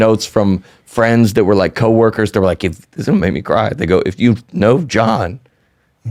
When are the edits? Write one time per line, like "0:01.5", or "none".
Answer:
none